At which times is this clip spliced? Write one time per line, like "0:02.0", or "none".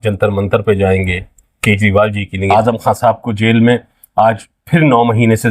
0:02.4